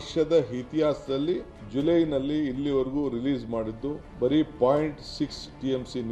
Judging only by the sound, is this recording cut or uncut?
cut